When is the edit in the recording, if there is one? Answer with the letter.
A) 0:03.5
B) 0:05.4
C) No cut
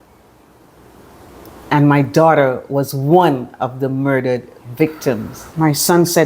B